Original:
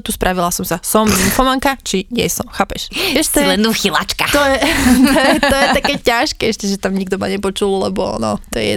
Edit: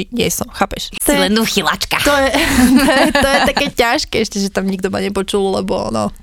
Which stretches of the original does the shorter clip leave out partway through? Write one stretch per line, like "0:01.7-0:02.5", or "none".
0:03.0-0:03.3